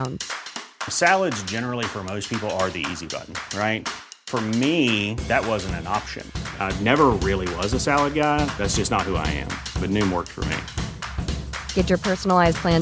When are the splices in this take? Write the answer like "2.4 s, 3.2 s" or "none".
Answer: none